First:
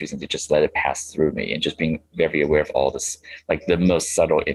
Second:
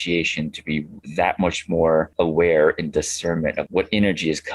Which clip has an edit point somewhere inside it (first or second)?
second